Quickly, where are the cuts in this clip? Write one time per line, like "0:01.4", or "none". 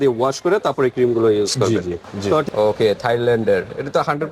0:02.1